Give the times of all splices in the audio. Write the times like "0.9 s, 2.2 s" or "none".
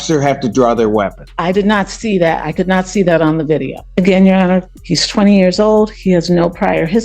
1.2 s, 3.8 s